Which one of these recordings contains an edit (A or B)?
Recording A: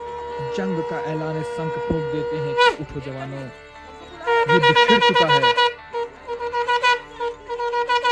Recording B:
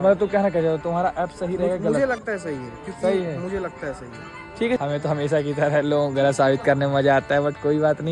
B